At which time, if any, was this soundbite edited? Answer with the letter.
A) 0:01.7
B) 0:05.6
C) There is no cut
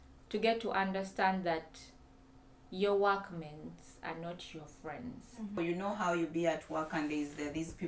B